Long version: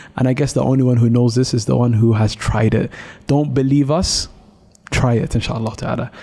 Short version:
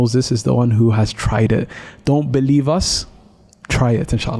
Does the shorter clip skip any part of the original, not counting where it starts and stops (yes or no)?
no